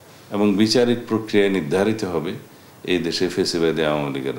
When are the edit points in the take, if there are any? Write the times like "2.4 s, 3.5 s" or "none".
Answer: none

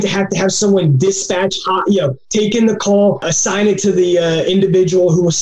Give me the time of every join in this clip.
2.2 s, 3.3 s

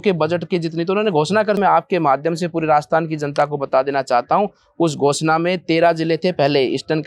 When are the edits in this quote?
1.6 s

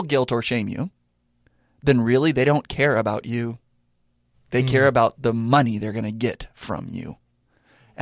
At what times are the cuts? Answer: none

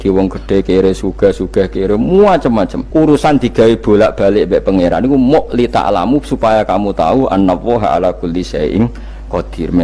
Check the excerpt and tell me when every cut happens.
2.8 s

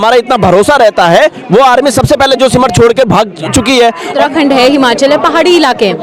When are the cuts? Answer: 4.2 s

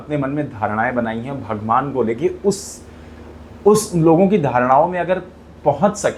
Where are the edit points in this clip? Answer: none

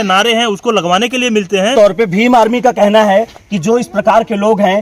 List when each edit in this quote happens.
1.7 s

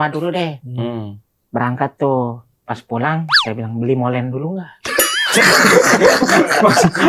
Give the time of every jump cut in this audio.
none

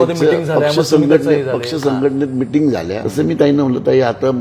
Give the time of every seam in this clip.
3.0 s

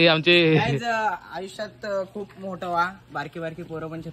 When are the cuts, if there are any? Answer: none

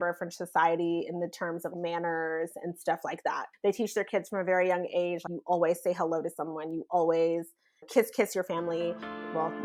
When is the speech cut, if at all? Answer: none

